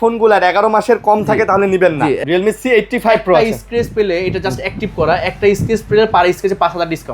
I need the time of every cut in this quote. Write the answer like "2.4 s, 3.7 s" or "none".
2.2 s

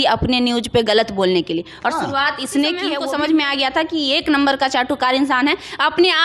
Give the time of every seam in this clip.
3.0 s

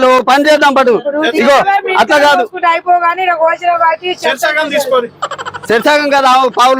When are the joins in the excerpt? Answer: none

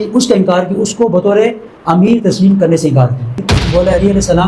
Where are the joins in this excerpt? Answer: 3.3 s

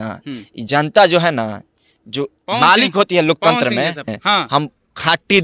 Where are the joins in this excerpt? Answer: 4.0 s

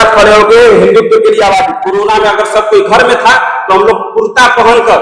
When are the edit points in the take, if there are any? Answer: 1.8 s

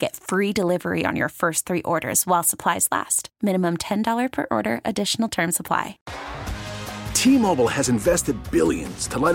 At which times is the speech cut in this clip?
6.0 s

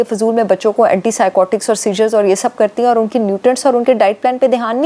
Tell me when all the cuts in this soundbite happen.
none

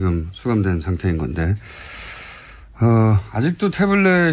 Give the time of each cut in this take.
none

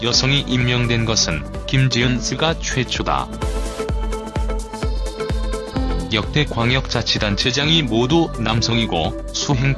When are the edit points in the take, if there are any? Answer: none

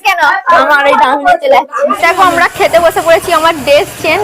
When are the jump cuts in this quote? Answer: 2.1 s

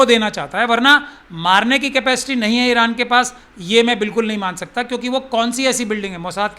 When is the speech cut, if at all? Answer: none

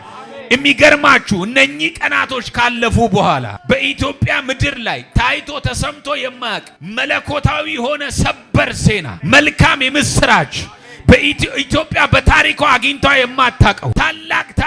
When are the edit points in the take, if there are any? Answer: 3.5 s, 6.8 s, 9.1 s, 13.8 s

